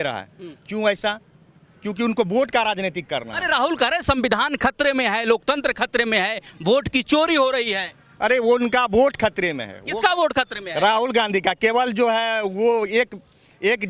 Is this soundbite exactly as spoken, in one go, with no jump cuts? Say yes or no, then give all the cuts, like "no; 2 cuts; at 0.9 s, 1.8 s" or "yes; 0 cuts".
yes; 0 cuts